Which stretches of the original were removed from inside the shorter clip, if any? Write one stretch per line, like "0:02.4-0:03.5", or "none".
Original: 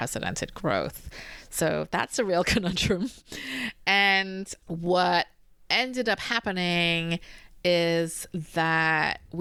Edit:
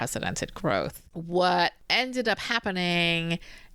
0:01.1-0:04.6
0:05.4-0:05.6